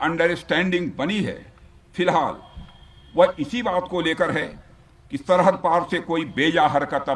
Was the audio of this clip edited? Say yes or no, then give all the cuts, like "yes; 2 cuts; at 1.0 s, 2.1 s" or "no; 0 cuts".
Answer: no; 0 cuts